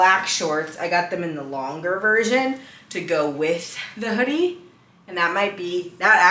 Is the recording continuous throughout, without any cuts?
yes; 0 cuts

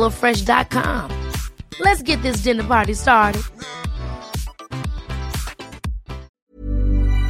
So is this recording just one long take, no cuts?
no; 1 cut; at 6.3 s

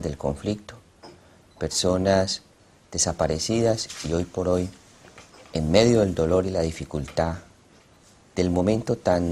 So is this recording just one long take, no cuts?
no; 1 cut; at 6.9 s

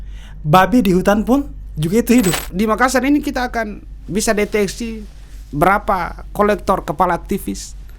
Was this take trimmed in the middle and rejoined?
yes; 1 cut; at 2.4 s

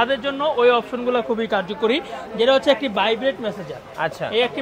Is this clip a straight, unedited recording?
yes; 0 cuts

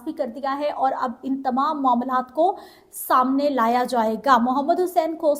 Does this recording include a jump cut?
no; 0 cuts

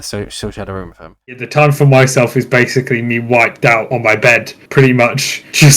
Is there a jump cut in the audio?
yes; 1 cut; at 1.4 s

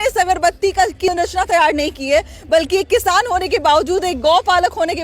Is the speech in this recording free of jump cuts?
no; 1 cut; at 1.1 s

